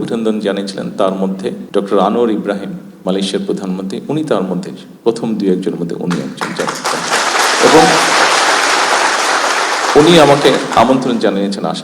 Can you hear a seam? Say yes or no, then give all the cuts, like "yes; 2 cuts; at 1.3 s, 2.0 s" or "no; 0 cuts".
yes; 2 cuts; at 1.6 s, 2.9 s